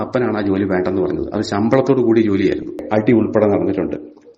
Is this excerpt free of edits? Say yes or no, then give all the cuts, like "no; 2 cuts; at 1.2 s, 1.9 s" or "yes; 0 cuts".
no; 1 cut; at 2.8 s